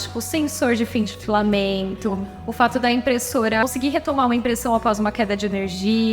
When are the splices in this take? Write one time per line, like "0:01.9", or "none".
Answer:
0:03.6